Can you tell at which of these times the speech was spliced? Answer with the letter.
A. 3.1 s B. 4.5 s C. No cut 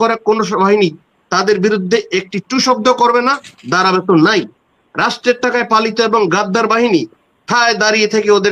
C